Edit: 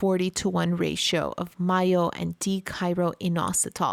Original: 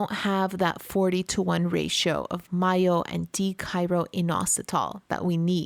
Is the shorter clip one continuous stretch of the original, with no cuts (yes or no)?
yes